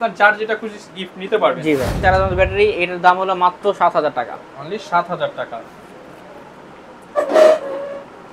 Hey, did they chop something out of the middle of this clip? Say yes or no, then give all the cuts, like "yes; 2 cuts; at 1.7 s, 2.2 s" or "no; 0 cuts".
yes; 1 cut; at 2.0 s